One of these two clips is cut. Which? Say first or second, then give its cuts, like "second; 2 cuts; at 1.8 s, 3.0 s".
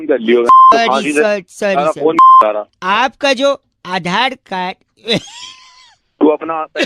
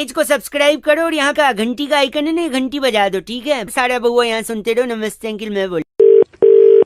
second; 1 cut; at 5.9 s